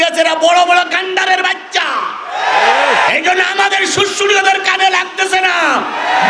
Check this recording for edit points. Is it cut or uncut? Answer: uncut